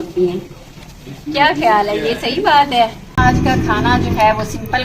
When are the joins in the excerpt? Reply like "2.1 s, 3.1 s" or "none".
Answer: 3.2 s